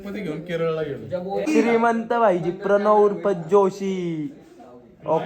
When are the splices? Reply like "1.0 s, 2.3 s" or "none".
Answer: 1.2 s